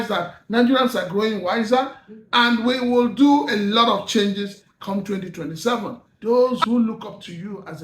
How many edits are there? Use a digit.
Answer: 1